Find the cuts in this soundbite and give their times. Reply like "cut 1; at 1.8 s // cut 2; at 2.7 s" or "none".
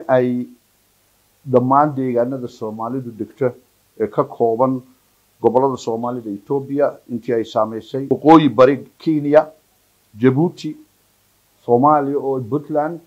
none